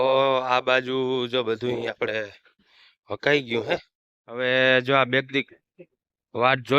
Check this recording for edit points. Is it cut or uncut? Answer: cut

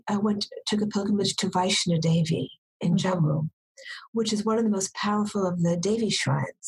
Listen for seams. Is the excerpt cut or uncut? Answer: uncut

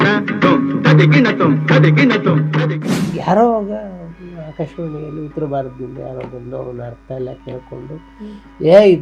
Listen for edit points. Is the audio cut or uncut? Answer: cut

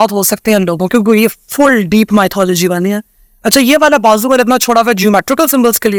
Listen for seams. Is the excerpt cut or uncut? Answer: uncut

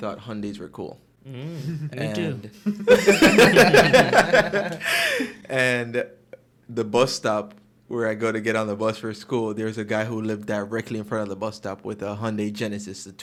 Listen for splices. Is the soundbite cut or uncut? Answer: uncut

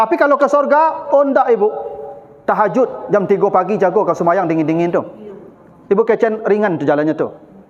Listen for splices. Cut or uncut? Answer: uncut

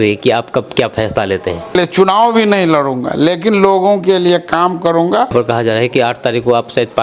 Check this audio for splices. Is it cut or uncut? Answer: cut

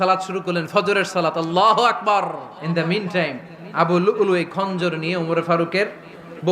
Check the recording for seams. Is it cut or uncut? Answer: cut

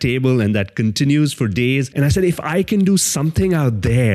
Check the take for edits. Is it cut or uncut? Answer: cut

